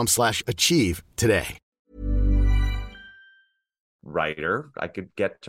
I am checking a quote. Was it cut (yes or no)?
no